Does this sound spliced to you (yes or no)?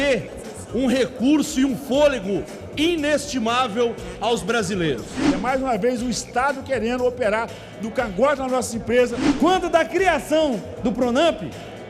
yes